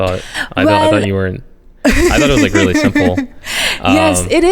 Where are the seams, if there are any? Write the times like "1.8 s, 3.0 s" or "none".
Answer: none